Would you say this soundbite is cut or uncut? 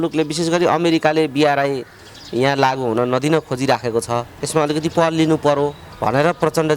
cut